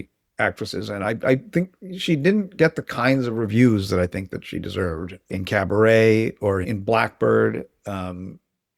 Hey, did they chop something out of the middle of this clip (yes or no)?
no